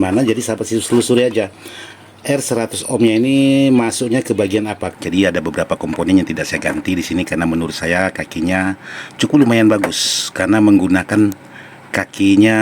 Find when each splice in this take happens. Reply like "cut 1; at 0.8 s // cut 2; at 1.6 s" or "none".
cut 1; at 4.8 s